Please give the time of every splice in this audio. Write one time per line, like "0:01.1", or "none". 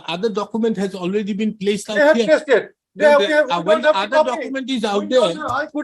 none

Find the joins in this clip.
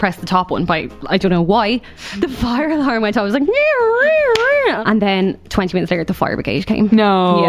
0:02.0
0:04.8

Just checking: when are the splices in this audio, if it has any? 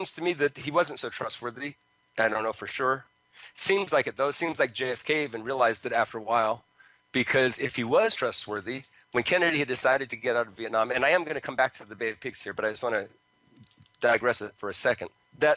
none

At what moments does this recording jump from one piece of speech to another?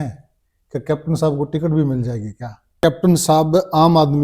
0:02.8

